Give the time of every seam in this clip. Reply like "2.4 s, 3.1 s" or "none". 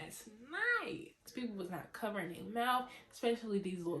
1.3 s